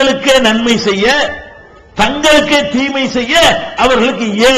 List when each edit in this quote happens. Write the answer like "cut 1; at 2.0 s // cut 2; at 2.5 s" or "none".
none